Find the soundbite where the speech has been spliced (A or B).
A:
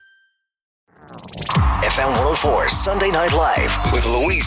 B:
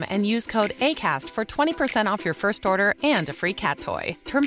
A